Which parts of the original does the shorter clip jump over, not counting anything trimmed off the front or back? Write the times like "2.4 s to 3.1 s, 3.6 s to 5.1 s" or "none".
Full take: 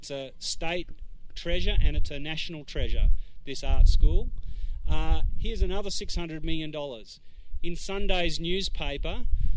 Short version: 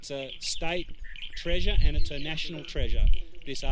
none